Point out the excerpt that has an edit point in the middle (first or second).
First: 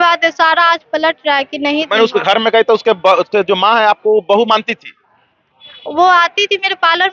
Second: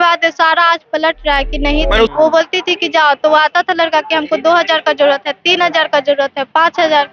second